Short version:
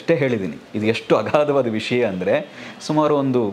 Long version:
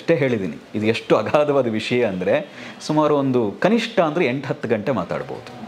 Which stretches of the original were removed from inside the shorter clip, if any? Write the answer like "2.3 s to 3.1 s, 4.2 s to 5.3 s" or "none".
none